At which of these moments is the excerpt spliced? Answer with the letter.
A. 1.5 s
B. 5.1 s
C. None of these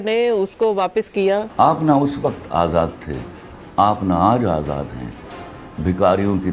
A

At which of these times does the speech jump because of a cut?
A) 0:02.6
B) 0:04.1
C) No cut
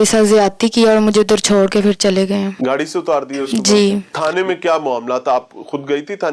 B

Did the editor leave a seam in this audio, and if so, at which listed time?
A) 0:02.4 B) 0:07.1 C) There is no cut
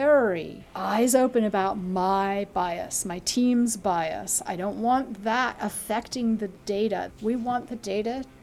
B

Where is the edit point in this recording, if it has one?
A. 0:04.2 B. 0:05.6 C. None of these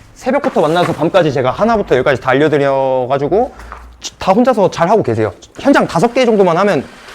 B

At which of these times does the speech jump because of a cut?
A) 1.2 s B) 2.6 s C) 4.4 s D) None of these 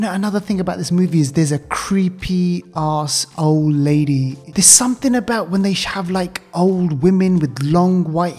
C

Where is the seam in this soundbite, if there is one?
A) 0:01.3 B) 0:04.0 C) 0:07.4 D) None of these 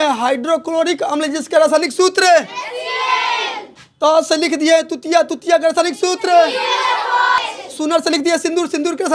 C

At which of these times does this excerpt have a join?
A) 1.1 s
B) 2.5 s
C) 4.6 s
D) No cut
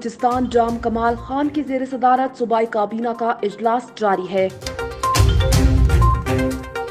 C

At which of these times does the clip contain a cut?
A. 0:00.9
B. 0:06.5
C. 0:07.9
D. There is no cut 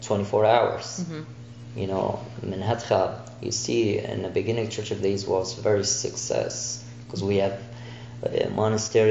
D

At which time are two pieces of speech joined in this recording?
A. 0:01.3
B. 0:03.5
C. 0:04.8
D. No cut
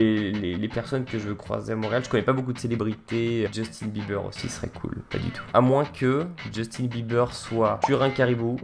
B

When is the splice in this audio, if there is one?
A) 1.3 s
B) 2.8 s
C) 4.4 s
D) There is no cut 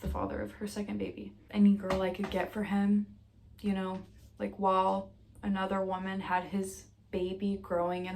A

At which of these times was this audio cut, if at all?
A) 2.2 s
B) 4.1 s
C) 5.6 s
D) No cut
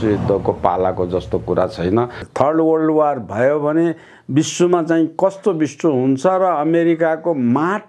A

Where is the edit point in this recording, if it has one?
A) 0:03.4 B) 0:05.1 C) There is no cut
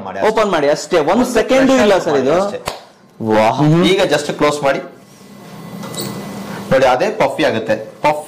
A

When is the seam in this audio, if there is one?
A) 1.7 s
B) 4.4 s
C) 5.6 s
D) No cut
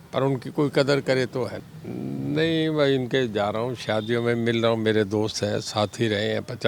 A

